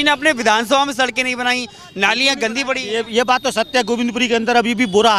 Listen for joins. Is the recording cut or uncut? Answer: uncut